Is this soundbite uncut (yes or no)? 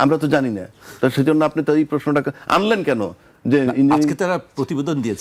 yes